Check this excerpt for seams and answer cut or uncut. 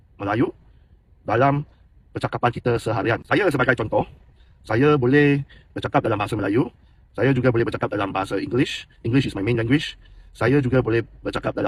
uncut